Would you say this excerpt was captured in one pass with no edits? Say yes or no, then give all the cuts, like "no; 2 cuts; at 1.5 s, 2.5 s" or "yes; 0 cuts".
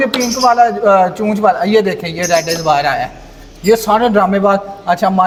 yes; 0 cuts